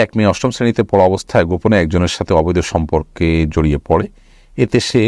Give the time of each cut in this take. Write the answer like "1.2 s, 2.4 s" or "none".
none